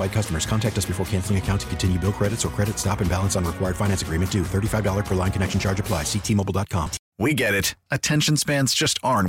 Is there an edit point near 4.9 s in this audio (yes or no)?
no